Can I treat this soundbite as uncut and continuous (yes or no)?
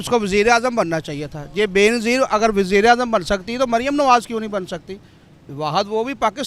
yes